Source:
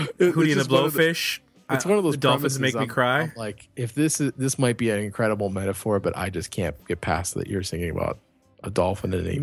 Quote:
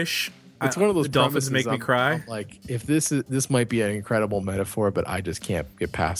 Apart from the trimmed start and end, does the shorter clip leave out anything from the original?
no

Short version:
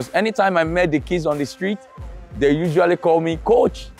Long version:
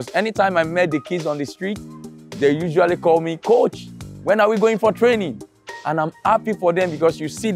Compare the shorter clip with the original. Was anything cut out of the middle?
no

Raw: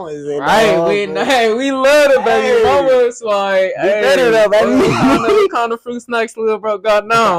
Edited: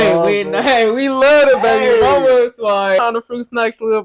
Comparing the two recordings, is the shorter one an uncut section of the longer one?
no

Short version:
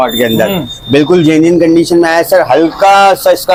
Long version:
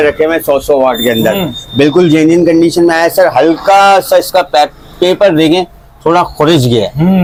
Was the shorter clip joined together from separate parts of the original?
no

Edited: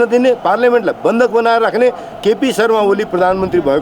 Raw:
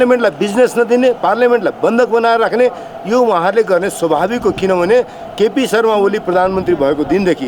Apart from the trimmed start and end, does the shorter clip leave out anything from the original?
yes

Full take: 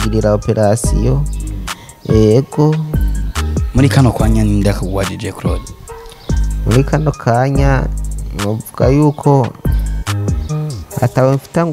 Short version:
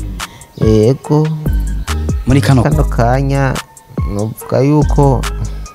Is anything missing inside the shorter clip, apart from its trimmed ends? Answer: yes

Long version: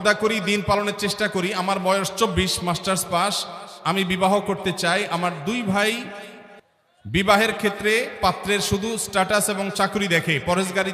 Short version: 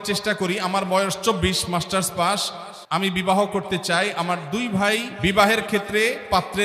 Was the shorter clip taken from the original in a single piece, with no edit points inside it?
no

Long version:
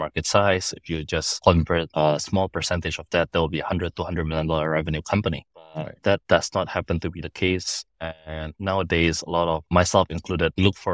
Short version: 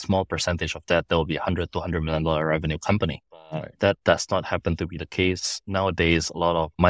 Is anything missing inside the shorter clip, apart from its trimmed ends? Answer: yes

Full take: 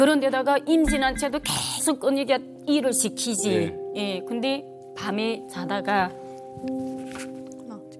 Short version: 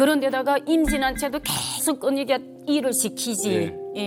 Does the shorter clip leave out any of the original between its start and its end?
no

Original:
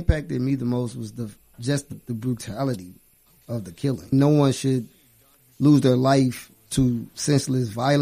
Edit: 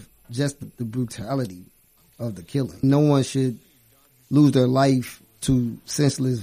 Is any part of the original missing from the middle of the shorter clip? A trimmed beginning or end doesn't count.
no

